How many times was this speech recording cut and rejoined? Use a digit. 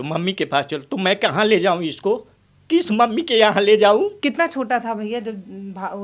1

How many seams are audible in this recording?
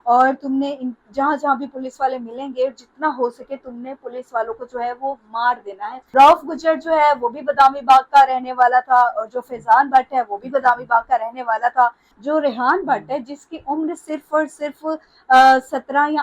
2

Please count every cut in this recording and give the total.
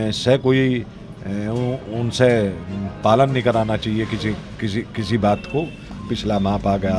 1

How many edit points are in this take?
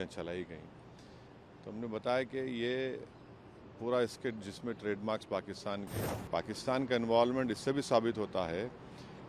1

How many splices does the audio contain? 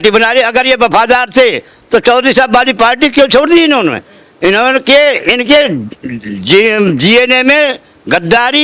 0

